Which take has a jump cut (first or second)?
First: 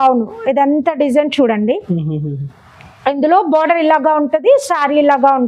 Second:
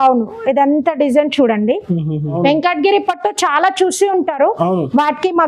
second